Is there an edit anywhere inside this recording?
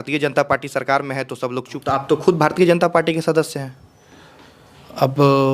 yes; 1 cut; at 1.8 s

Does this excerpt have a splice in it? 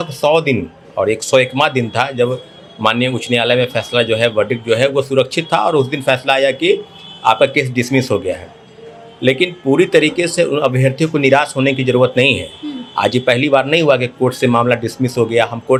no; 0 cuts

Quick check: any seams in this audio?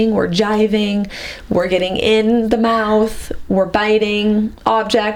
no; 0 cuts

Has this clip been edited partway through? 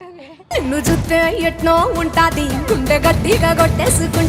no; 0 cuts

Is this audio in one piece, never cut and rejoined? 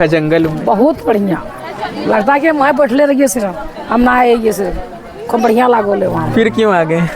yes; 0 cuts

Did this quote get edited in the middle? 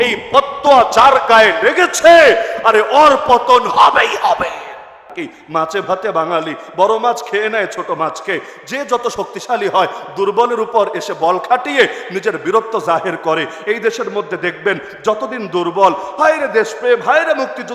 yes; 1 cut; at 5.1 s

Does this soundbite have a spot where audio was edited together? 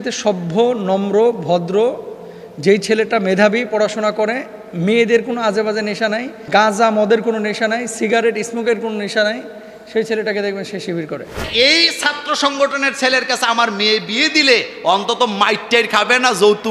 yes; 2 cuts; at 6.5 s, 11.5 s

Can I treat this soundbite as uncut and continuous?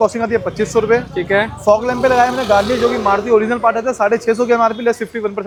yes; 0 cuts

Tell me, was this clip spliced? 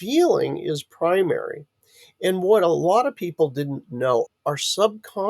yes; 1 cut; at 4.3 s

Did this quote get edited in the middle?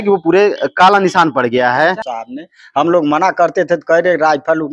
yes; 1 cut; at 2.0 s

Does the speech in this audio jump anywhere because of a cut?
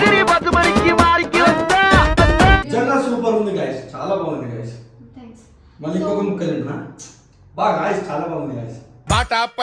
yes; 1 cut; at 2.7 s

